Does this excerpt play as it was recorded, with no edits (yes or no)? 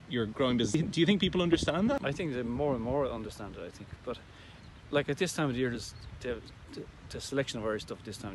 no